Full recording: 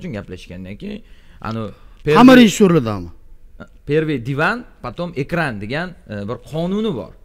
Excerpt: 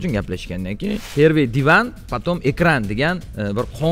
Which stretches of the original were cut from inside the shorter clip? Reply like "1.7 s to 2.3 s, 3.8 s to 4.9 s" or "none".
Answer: 1.0 s to 3.7 s